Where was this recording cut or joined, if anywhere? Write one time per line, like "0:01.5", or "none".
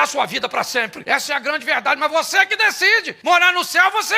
0:01.0
0:03.1